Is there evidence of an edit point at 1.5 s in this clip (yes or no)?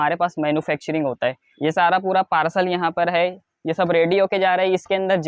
yes